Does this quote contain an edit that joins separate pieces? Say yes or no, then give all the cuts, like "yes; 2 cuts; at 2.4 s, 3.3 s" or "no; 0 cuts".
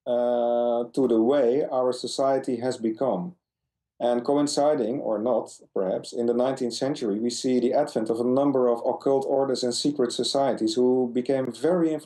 no; 0 cuts